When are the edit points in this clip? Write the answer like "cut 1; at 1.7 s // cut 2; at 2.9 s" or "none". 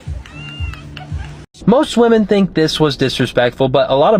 cut 1; at 1.5 s